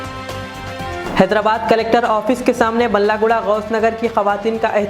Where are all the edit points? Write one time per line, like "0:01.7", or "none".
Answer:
0:01.0